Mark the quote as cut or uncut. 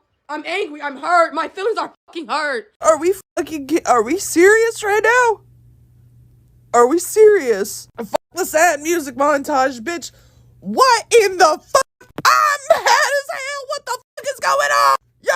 cut